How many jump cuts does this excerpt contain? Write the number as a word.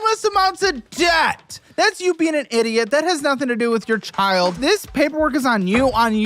two